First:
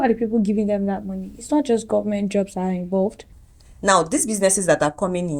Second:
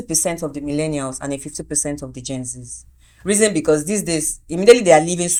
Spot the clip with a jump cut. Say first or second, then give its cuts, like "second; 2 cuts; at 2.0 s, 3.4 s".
first; 1 cut; at 3.2 s